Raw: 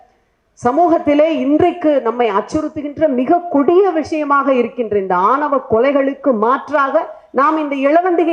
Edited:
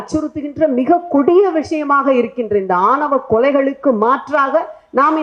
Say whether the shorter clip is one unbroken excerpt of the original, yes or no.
yes